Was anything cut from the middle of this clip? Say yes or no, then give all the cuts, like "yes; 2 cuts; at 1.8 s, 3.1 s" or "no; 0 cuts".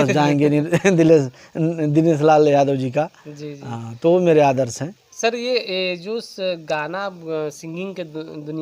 no; 0 cuts